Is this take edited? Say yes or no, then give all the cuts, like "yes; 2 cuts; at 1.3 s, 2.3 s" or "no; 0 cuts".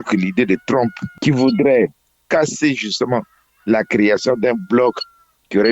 yes; 1 cut; at 1.1 s